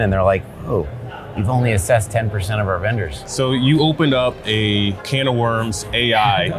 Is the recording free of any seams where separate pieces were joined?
no; 2 cuts; at 3.2 s, 5.0 s

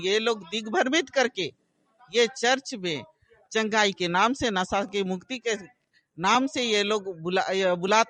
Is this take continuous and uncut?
yes; 0 cuts

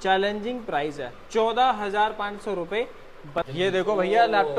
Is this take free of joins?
no; 1 cut; at 3.5 s

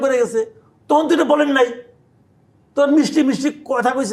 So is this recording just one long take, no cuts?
yes; 0 cuts

